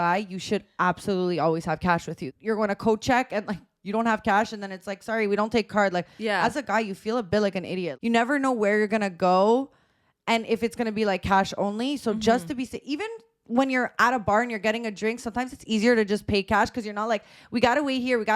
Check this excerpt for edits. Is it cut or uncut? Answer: cut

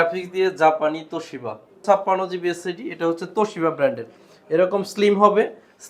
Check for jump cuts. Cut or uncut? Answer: cut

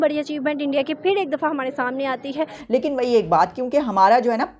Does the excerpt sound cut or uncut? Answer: cut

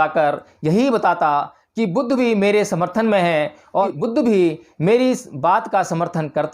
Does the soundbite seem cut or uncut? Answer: cut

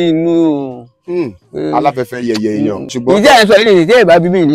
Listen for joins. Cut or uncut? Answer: cut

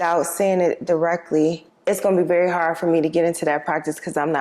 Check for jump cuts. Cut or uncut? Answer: uncut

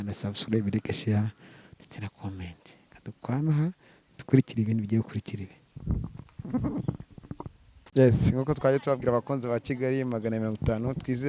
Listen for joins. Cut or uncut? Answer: uncut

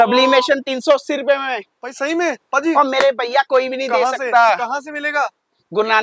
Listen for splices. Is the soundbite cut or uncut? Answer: uncut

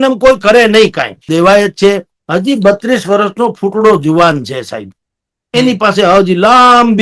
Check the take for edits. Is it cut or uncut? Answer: cut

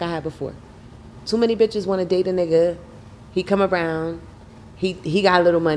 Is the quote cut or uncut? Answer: uncut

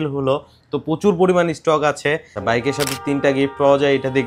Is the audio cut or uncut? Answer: cut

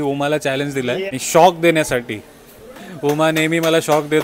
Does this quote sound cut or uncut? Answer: cut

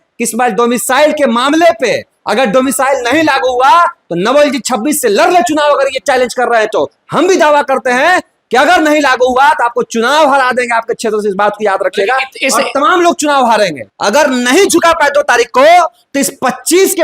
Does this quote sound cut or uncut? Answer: cut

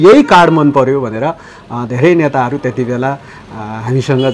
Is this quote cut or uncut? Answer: uncut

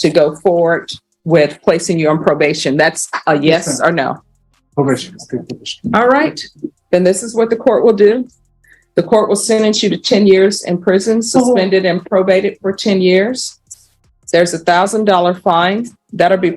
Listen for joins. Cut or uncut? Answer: uncut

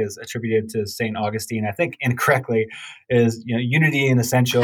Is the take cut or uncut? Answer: uncut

